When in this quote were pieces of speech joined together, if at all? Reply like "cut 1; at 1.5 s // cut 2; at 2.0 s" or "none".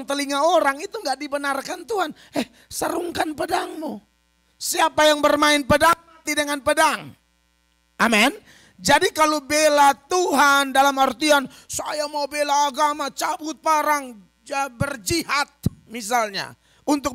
none